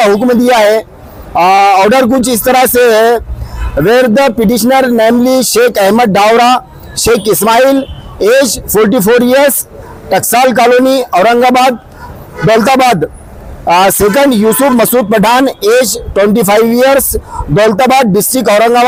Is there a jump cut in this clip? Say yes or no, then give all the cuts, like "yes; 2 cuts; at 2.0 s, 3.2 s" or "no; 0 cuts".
no; 0 cuts